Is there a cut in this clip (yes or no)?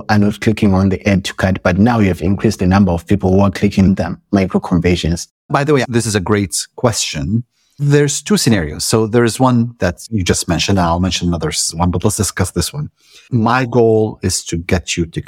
yes